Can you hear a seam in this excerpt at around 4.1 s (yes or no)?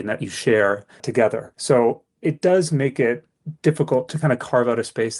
yes